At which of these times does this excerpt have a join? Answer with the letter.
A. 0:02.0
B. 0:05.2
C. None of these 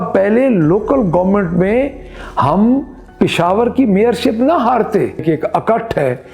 B